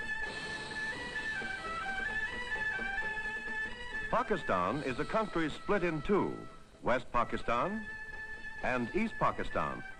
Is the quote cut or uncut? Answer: cut